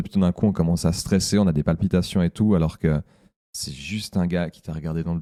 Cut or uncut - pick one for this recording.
uncut